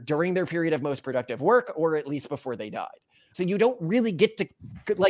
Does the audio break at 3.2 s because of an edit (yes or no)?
no